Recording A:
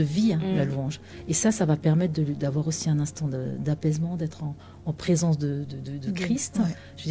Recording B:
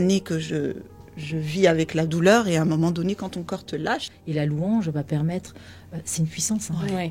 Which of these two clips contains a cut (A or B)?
B